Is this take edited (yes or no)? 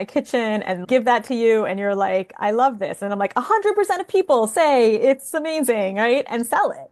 no